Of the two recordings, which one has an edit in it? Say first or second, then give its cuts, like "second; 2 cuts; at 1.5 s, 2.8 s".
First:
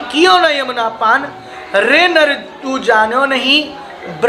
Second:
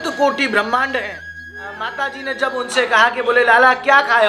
second; 1 cut; at 1.8 s